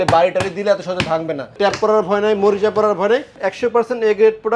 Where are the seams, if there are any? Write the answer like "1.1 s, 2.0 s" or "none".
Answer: 1.5 s, 3.4 s